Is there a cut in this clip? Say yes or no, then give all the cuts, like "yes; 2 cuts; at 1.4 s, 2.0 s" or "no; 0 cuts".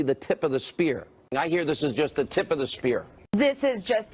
no; 0 cuts